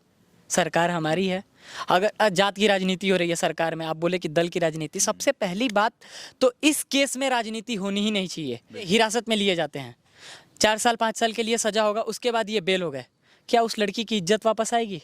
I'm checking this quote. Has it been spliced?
yes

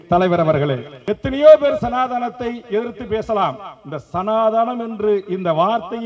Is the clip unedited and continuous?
no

